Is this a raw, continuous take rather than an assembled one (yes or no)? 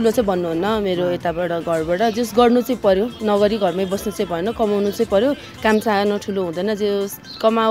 yes